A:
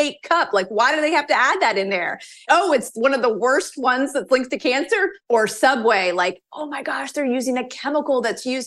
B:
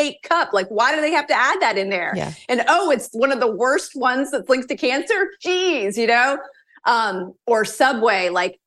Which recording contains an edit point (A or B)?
A